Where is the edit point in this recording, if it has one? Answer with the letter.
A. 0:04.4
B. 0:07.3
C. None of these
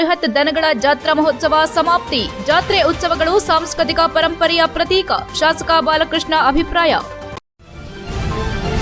B